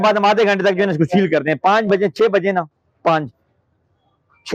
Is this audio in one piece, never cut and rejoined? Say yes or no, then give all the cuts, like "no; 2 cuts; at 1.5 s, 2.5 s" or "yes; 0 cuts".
yes; 0 cuts